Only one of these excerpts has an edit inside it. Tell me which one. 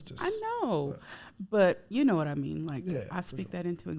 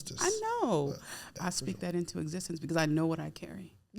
second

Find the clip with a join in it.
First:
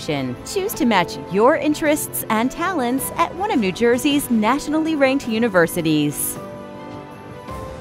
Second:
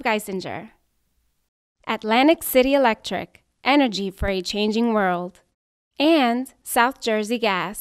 first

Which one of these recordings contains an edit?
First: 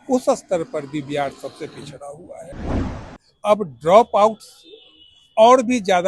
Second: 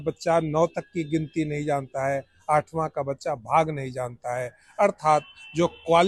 first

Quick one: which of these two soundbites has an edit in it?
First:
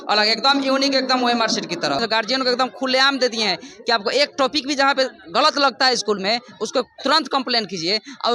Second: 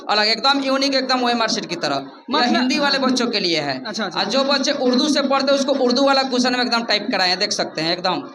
first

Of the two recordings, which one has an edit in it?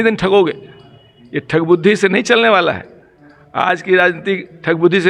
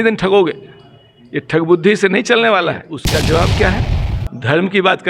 second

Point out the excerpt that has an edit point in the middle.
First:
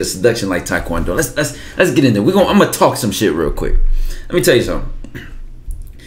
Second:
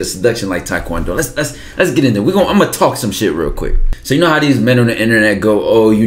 second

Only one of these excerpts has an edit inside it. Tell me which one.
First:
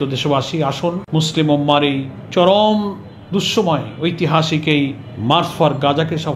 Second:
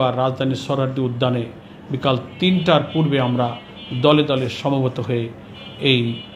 first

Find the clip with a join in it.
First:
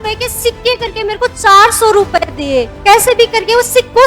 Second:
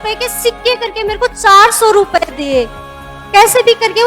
first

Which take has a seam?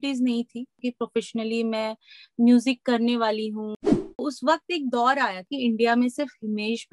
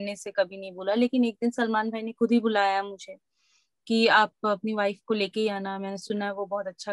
first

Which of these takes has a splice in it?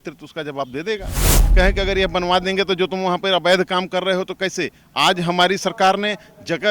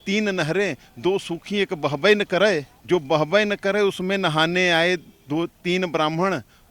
first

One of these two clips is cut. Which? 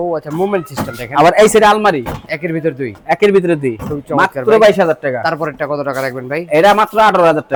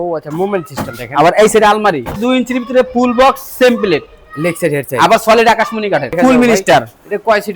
second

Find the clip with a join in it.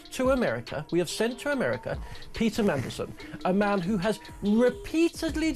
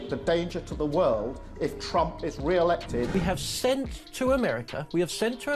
second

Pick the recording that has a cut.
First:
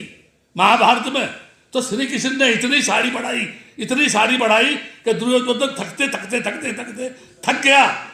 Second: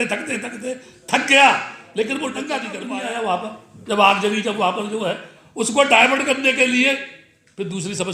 second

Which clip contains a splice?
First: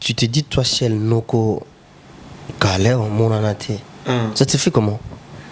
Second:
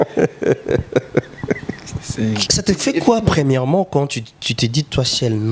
second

